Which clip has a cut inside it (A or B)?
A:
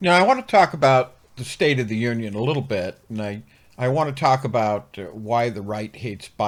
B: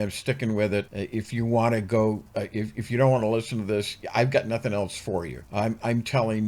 B